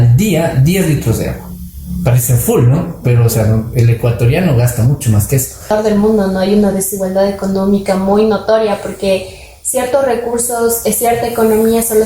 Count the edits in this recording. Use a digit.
1